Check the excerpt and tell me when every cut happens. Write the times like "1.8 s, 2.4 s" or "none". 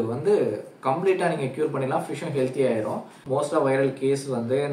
3.2 s